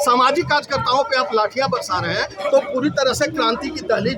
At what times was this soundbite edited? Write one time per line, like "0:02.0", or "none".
none